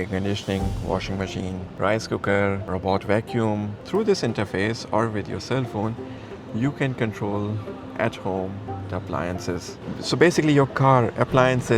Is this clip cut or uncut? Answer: cut